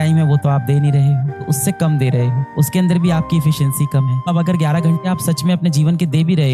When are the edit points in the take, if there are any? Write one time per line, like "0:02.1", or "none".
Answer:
0:01.4
0:04.3